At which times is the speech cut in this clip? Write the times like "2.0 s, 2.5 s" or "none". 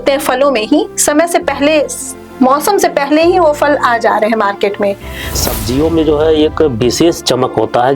5.4 s